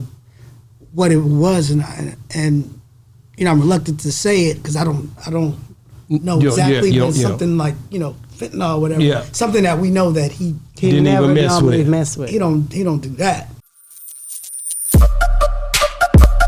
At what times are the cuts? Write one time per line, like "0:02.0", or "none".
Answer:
0:13.5